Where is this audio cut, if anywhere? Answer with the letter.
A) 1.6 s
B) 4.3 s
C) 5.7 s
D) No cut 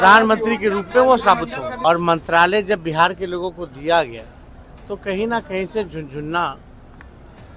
A